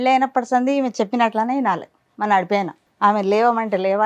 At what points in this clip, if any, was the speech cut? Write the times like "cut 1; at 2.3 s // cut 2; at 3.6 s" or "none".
cut 1; at 2.8 s